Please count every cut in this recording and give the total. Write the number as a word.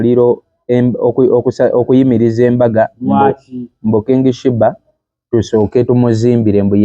zero